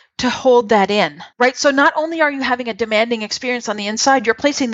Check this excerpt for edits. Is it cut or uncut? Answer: cut